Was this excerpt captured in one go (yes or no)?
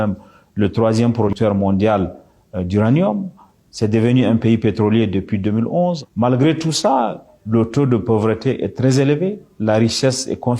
no